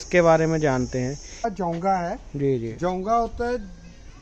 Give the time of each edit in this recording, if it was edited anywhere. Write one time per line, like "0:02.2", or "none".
0:01.5

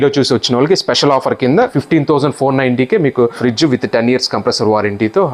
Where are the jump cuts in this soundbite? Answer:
0:01.8
0:03.4

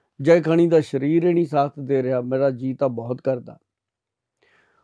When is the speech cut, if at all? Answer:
none

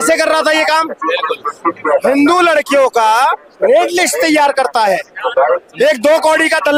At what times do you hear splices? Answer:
none

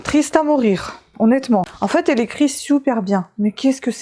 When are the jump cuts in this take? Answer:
none

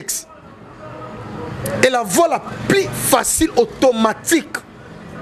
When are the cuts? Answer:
none

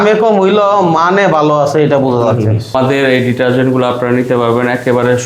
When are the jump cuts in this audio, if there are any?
0:02.6

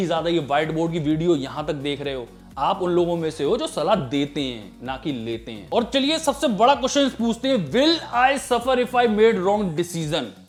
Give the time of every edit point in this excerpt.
none

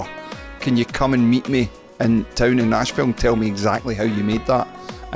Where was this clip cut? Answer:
none

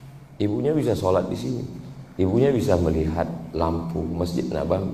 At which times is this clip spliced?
none

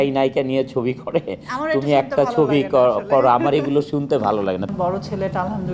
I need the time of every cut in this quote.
0:04.7

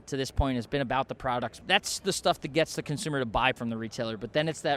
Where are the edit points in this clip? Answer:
0:01.6
0:03.6

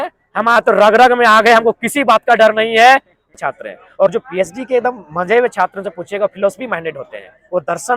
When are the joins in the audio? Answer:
0:03.3

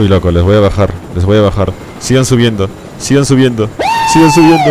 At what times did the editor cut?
0:01.9

